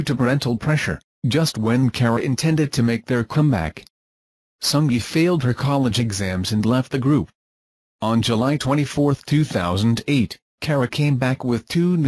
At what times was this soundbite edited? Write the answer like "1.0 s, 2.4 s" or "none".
5.4 s

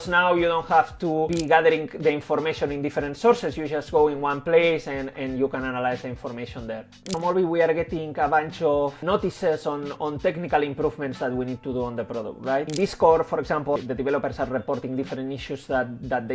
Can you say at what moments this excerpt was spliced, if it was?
1.3 s, 7.1 s, 9.0 s, 12.7 s, 13.8 s

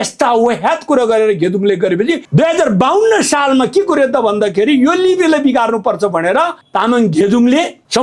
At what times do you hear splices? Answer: 2.3 s

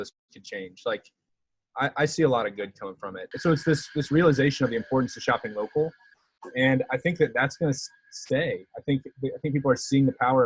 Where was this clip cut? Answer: 3.2 s

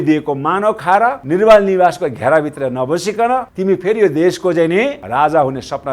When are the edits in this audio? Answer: 1.2 s, 3.5 s, 5.0 s

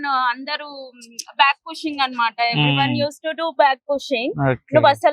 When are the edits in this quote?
none

